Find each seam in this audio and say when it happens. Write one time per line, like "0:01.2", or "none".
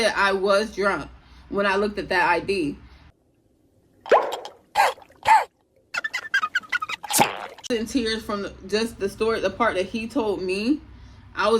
0:07.7